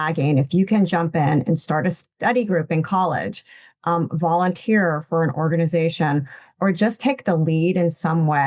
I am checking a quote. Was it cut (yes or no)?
no